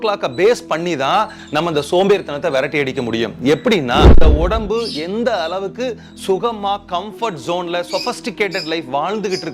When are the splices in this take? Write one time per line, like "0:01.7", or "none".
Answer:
0:04.2